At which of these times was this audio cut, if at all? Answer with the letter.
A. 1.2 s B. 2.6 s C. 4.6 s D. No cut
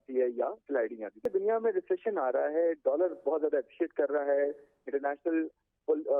A